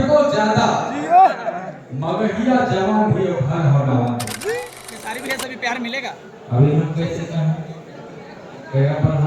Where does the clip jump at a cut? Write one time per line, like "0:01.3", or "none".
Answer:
0:04.6

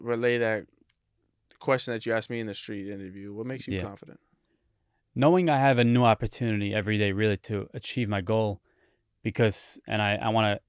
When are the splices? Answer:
none

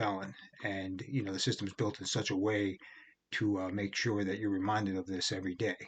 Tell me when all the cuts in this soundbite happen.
none

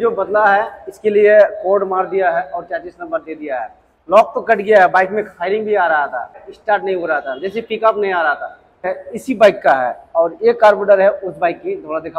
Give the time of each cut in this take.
0:06.5
0:09.0

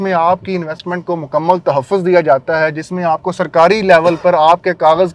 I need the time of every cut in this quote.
none

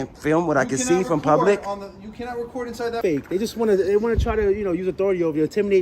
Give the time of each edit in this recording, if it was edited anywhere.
0:03.0

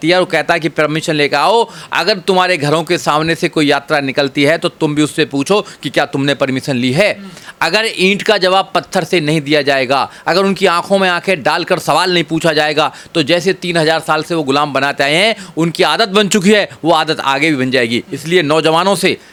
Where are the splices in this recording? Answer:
none

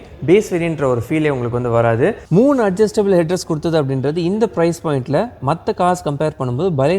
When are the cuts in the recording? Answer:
0:02.2

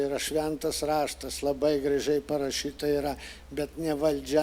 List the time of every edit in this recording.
none

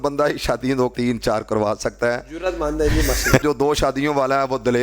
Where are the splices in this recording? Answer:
0:00.9
0:03.4

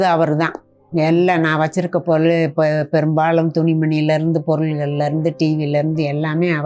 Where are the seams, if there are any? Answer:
none

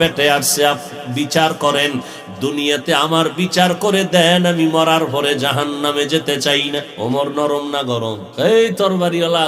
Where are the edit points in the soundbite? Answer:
0:06.9
0:08.2

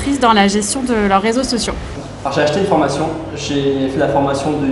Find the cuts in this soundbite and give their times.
0:02.0

